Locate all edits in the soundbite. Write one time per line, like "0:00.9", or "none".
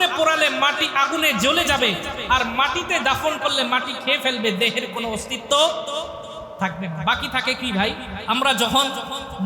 0:08.1